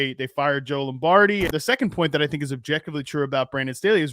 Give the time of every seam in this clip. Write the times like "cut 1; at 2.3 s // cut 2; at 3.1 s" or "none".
cut 1; at 1.5 s